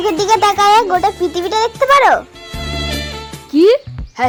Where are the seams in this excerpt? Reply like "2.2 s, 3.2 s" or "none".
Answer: none